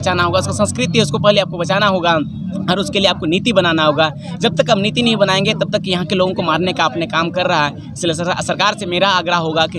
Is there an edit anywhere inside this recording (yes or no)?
no